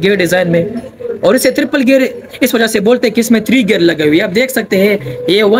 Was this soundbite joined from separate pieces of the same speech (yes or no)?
no